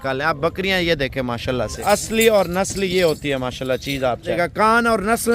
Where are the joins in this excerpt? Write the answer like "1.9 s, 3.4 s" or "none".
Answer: 1.8 s, 4.3 s